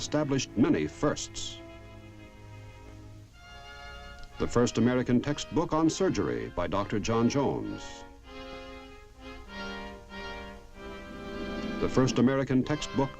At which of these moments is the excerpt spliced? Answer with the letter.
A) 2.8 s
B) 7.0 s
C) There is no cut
A